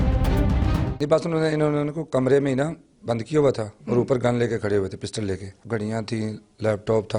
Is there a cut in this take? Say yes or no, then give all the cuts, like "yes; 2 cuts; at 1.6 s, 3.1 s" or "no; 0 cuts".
yes; 2 cuts; at 0.9 s, 5.5 s